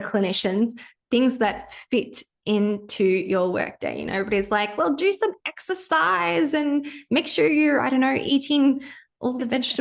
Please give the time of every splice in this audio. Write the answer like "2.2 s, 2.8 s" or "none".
none

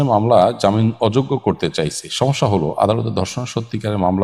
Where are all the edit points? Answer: none

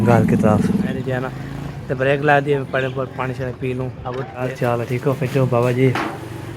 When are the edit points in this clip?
0.9 s, 4.5 s

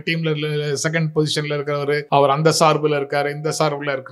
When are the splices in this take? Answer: 2.0 s

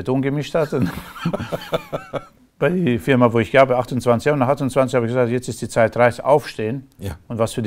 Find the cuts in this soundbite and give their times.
none

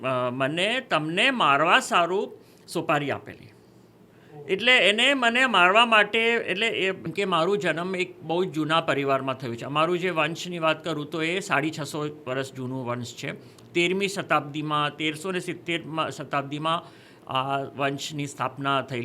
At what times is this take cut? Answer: 7.0 s

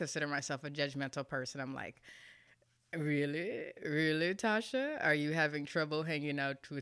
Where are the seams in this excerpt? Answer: none

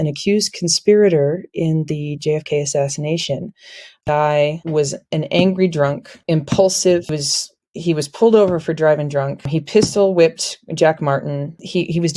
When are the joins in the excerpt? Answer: 4.0 s

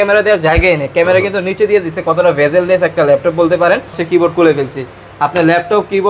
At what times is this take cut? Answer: 4.0 s

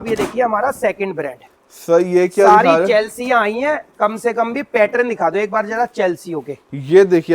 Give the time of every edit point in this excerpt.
none

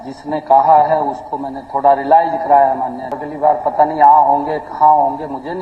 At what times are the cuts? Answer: 3.2 s

